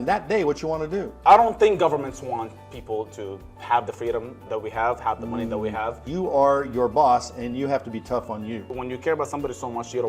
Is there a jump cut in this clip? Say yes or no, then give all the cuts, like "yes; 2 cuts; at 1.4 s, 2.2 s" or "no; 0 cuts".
yes; 3 cuts; at 1.1 s, 6.0 s, 8.7 s